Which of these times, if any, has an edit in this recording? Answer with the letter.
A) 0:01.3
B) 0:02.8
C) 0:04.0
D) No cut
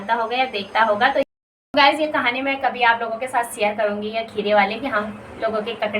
A